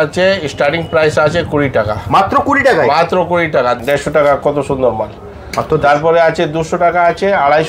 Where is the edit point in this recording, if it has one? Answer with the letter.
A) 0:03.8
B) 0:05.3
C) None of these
A